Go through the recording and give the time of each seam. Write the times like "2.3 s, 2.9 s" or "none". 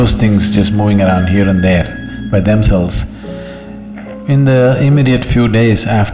none